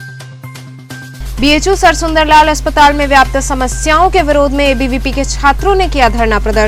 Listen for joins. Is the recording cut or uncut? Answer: cut